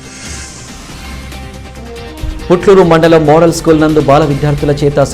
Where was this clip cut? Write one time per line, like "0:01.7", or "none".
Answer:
0:01.0